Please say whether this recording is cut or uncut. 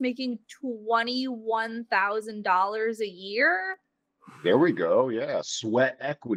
uncut